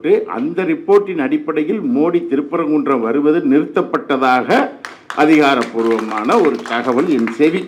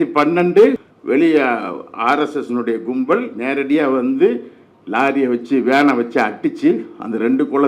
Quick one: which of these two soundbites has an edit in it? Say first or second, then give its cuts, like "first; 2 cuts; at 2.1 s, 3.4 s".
second; 1 cut; at 0.9 s